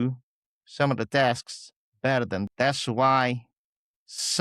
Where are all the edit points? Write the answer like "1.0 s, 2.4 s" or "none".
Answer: 2.5 s